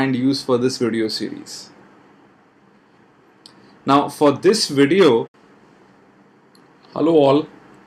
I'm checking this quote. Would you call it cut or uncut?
uncut